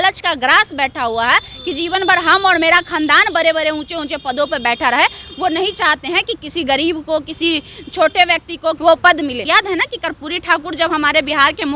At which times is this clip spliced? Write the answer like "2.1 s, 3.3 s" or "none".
8.8 s, 9.5 s